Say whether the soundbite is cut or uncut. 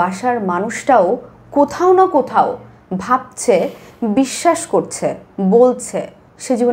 uncut